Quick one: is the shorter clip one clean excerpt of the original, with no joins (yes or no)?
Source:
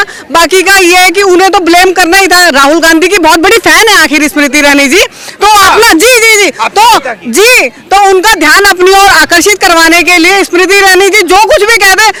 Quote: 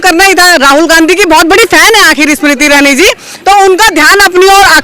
no